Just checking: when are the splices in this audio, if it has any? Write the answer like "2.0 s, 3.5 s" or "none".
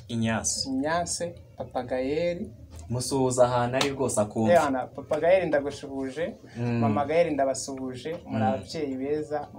none